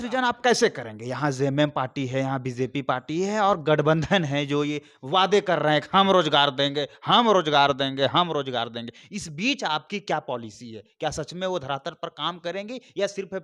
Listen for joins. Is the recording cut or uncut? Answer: uncut